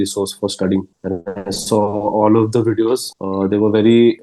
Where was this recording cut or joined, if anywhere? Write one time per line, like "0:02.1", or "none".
0:01.0
0:03.1

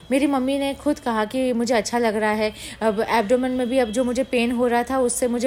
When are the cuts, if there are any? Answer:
none

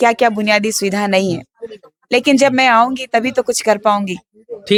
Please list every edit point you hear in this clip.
none

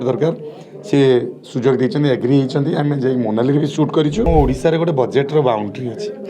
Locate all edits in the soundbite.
0:04.3

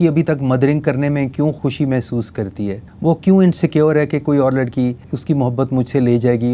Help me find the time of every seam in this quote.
0:01.6
0:02.9
0:05.1

